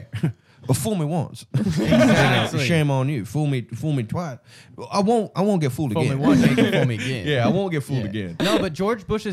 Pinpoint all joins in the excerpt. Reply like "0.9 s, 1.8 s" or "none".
8.3 s